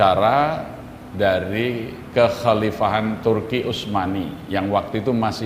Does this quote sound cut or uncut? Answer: uncut